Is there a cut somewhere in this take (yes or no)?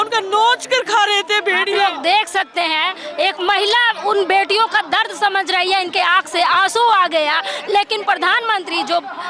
no